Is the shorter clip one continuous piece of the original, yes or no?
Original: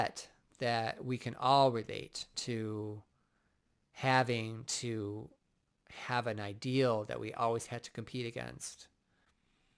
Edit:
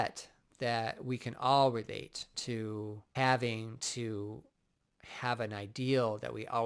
no